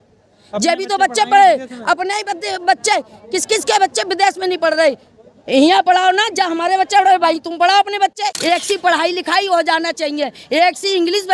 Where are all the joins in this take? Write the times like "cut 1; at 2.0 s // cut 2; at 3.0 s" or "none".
cut 1; at 8.4 s